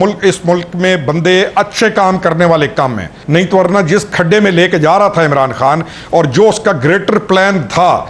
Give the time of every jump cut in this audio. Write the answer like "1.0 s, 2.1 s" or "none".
3.1 s